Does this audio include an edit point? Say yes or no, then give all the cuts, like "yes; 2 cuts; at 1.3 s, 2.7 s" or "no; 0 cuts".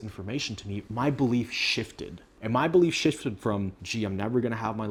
no; 0 cuts